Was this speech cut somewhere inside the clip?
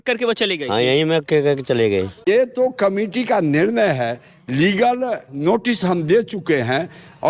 yes; 1 cut; at 2.3 s

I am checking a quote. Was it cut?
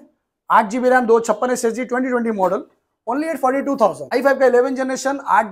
yes; 1 cut; at 4.1 s

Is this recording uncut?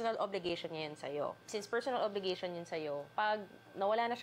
no; 2 cuts; at 1.4 s, 3.1 s

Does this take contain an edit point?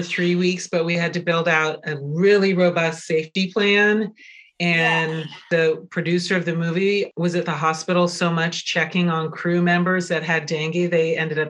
yes; 1 cut; at 3.3 s

